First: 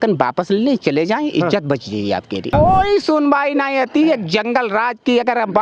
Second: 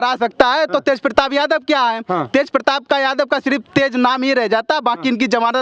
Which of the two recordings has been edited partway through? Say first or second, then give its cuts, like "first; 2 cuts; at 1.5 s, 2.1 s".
first; 1 cut; at 2.5 s